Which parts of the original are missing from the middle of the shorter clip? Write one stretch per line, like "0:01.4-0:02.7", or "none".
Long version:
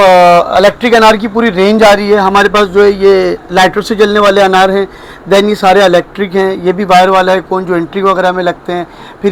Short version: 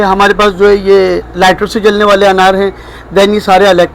none

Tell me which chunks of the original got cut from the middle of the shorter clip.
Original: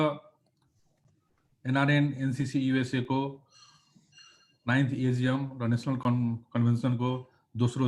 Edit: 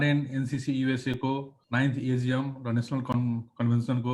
0:03.4-0:04.5

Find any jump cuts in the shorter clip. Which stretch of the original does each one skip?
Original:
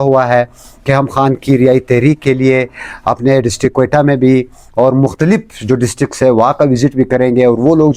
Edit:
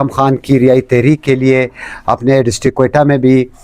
none

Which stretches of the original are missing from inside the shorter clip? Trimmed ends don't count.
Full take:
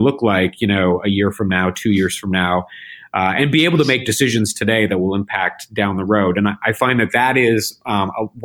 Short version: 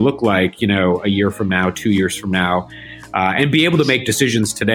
none

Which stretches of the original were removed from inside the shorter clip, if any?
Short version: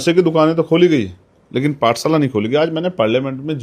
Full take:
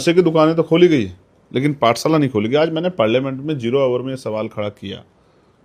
none

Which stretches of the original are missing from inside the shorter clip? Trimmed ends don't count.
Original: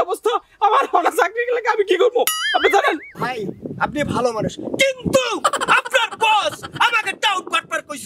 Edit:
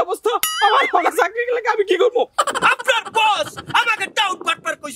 0:02.3-0:05.4

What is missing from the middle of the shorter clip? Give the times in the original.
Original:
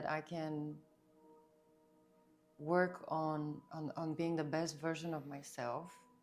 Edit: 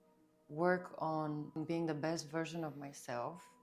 0:03.6-0:04.0

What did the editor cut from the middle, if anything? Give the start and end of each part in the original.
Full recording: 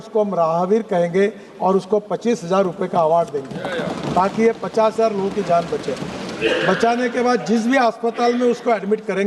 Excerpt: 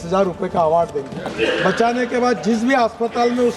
0:03.6-0:06.2

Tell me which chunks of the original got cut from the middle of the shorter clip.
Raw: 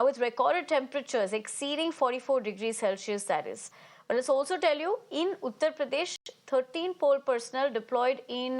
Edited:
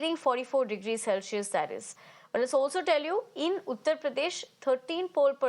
0:06.2-0:06.3

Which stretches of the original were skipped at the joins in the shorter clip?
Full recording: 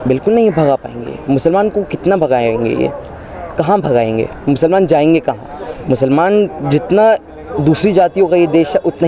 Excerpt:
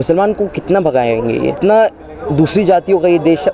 0:02.9-0:06.9

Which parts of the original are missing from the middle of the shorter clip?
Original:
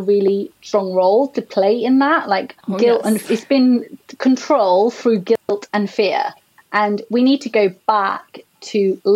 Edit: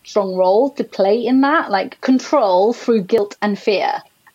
0:02.5-0:04.1
0:05.4-0:05.5

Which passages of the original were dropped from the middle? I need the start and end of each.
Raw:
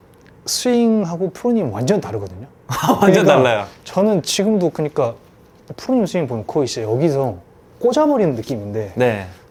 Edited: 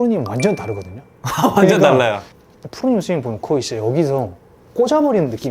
0:03.8-0:05.4

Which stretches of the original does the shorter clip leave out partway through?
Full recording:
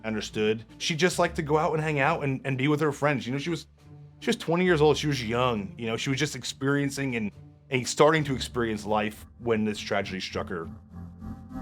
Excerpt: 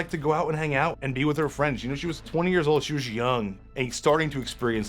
0:02.2-0:02.4
0:03.7-0:04.4
0:05.7-0:07.5

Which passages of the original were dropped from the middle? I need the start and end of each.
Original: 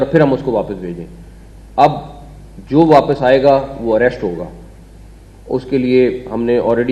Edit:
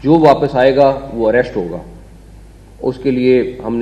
none

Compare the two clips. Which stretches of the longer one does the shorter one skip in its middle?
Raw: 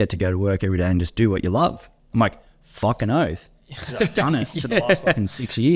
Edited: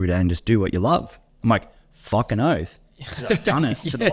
none

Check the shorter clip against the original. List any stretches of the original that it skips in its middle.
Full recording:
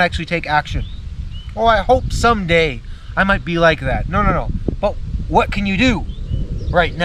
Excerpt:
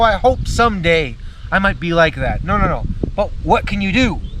0:05.0-0:05.2

